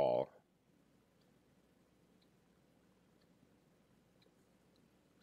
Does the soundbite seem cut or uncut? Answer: uncut